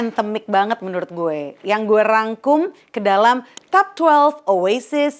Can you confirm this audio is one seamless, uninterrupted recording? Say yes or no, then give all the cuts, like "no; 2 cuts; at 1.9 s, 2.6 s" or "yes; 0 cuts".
yes; 0 cuts